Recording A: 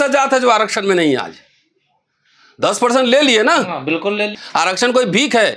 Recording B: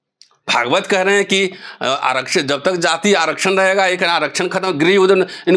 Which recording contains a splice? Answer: A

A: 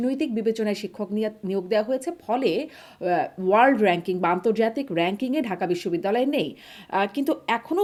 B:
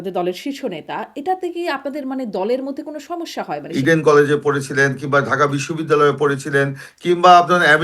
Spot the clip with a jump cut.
B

